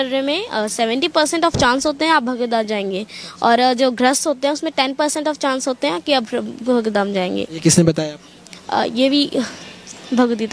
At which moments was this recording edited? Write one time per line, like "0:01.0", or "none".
none